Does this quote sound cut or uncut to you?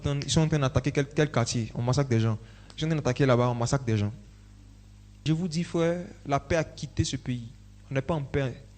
cut